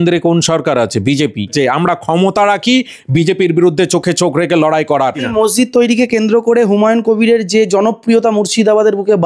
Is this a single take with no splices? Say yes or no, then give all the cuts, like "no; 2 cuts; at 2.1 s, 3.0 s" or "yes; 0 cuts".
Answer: no; 2 cuts; at 1.5 s, 5.2 s